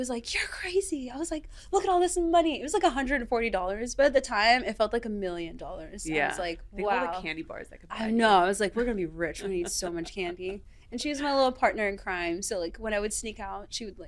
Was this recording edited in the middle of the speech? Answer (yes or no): no